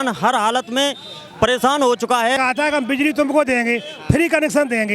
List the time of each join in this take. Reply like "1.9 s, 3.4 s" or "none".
2.4 s